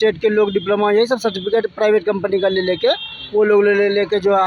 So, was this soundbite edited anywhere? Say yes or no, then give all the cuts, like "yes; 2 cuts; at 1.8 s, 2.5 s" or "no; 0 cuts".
no; 0 cuts